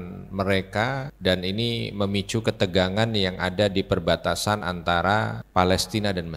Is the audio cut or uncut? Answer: cut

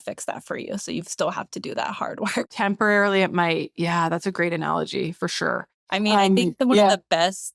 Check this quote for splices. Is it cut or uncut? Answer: cut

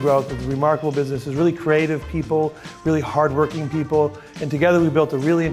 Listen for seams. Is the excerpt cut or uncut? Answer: uncut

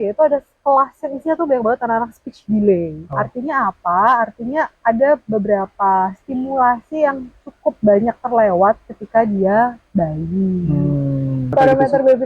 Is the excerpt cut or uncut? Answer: cut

